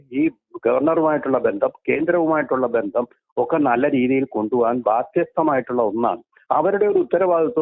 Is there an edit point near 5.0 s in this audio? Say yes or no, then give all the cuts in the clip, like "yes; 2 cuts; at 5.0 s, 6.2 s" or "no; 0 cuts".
no; 0 cuts